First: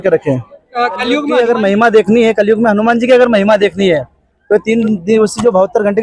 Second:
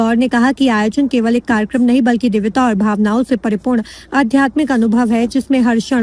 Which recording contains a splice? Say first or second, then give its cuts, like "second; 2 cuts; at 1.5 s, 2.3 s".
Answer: first; 1 cut; at 1.3 s